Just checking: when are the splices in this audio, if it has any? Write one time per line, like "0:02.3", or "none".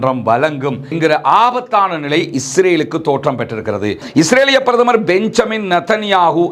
0:04.0